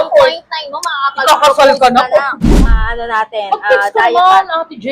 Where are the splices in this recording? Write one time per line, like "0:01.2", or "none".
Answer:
0:02.5